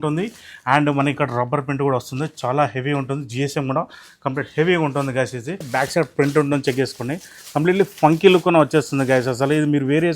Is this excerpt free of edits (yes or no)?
no